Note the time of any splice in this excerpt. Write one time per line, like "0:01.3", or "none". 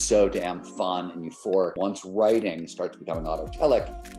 0:01.7